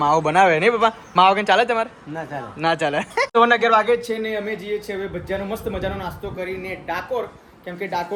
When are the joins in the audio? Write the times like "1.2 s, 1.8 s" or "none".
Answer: none